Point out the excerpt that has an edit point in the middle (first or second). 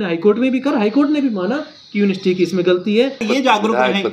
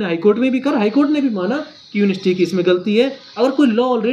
first